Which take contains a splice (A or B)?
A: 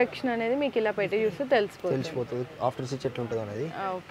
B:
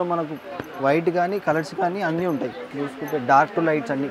B